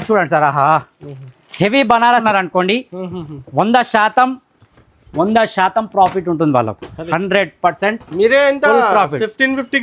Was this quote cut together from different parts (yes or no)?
yes